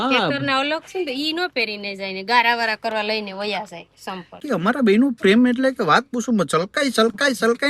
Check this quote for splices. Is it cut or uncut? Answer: cut